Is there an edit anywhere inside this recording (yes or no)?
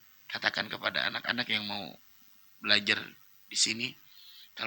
no